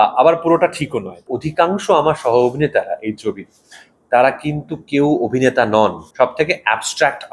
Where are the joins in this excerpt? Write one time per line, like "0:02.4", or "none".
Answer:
0:01.1
0:06.0